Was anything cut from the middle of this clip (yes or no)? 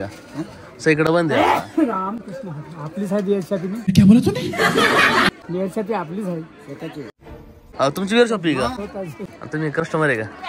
yes